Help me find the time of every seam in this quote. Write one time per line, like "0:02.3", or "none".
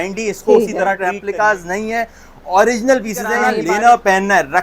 0:01.1
0:03.5